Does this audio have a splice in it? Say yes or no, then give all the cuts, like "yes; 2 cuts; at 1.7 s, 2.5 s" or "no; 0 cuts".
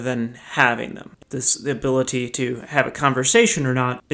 yes; 1 cut; at 1.2 s